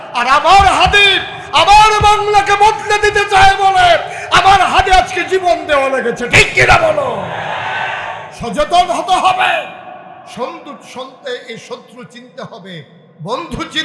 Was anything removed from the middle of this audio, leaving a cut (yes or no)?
yes